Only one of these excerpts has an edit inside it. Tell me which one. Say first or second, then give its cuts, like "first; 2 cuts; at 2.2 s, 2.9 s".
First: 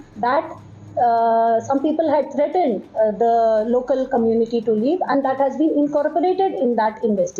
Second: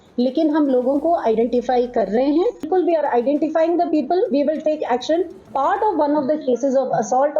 second; 2 cuts; at 2.7 s, 5.4 s